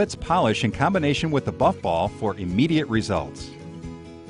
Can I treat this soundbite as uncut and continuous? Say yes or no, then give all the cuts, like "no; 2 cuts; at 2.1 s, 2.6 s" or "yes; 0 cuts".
no; 1 cut; at 3.3 s